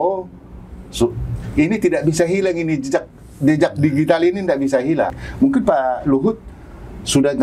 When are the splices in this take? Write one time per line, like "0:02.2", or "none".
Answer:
0:05.2